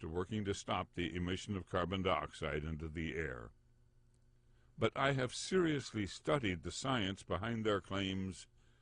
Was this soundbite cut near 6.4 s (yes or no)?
yes